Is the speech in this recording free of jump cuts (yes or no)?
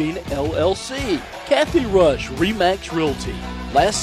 no